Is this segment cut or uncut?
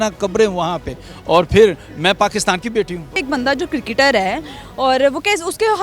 cut